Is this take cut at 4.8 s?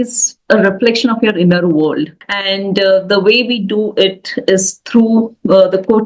no; 1 cut; at 2.2 s

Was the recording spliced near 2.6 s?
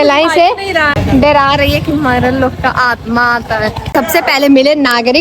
no; 2 cuts; at 1.0 s, 3.9 s

